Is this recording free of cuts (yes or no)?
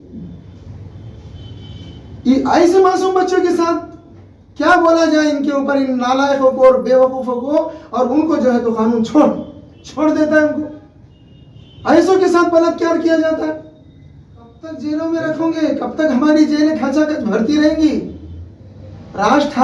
no